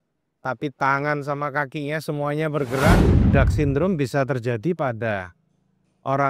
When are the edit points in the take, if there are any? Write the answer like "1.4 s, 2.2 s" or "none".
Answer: 3.1 s